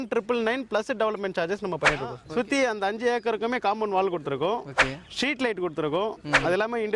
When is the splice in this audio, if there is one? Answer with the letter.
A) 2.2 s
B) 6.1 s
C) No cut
A